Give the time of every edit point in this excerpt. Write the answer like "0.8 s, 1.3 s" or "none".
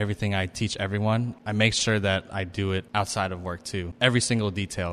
1.4 s, 2.9 s, 3.9 s